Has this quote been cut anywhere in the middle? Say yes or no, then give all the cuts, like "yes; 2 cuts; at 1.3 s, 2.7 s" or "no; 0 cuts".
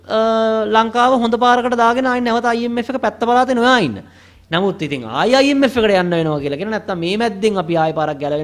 no; 0 cuts